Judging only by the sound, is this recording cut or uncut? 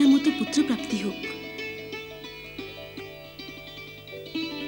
uncut